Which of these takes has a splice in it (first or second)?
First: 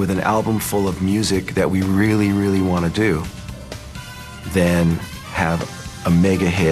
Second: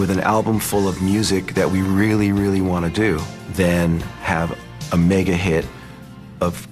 second